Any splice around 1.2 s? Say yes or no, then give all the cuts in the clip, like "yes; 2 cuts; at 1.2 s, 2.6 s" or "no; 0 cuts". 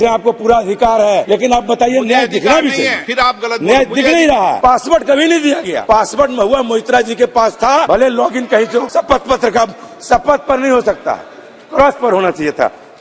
yes; 6 cuts; at 1.2 s, 3.0 s, 4.6 s, 5.7 s, 7.9 s, 8.9 s